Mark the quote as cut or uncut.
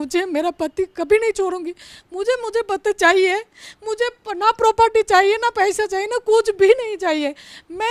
uncut